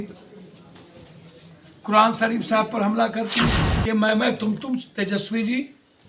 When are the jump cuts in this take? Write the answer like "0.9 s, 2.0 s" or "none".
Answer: 3.7 s